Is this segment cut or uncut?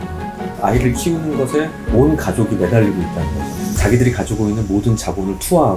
uncut